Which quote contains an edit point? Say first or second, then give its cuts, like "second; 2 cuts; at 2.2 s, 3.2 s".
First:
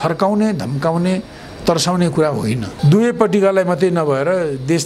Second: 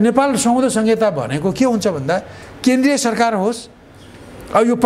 first; 1 cut; at 2.7 s